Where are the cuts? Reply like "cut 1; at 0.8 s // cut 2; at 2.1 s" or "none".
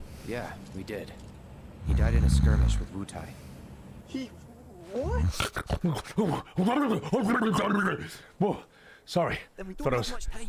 none